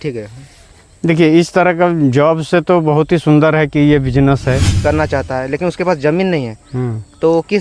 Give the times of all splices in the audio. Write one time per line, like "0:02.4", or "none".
0:04.7